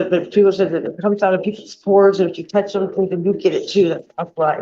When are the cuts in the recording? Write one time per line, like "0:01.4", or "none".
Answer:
none

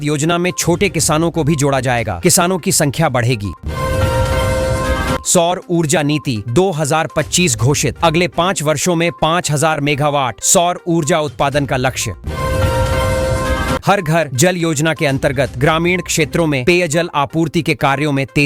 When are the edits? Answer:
0:03.6
0:05.2
0:12.2
0:13.8

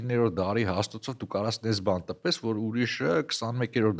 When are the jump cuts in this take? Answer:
none

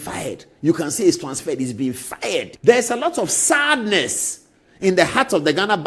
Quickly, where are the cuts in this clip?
0:02.5

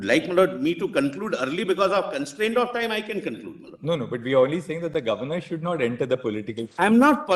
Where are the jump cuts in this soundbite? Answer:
none

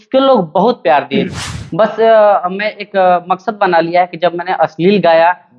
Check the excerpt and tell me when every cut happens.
0:01.4

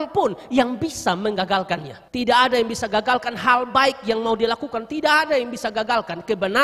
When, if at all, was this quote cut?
0:02.0

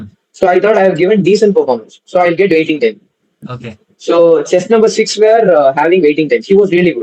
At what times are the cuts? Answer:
none

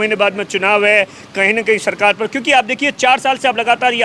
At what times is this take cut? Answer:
none

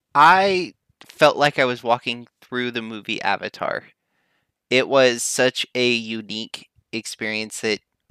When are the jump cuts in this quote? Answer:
none

